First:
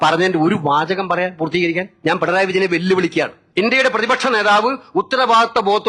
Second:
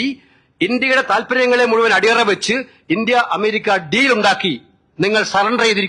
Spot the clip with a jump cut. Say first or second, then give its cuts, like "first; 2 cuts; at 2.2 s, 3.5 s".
first; 2 cuts; at 1.9 s, 3.4 s